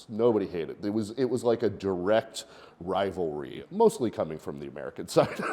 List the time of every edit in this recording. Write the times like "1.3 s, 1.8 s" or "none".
3.6 s